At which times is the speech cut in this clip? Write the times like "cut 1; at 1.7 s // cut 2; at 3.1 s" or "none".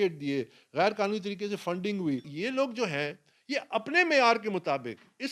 cut 1; at 2.3 s